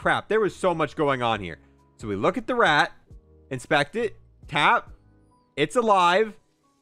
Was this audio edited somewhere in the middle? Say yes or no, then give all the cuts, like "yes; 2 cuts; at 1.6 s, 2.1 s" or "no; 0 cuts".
no; 0 cuts